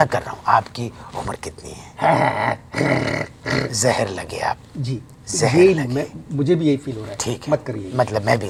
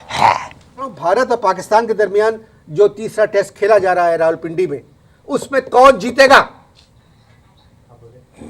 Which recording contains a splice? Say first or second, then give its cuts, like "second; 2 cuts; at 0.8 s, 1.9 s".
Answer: second; 1 cut; at 1.0 s